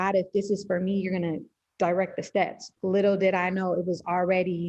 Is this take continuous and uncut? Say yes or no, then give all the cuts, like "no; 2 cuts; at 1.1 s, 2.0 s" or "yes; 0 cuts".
no; 1 cut; at 2.7 s